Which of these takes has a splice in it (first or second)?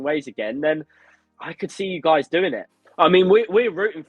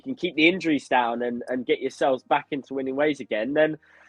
first